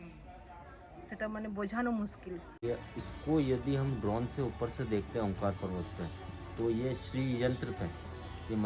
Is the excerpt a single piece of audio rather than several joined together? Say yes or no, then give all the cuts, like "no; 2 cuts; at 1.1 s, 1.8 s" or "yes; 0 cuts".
no; 1 cut; at 2.6 s